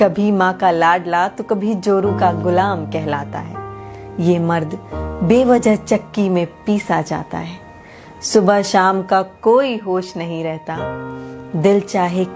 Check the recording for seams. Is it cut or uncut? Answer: cut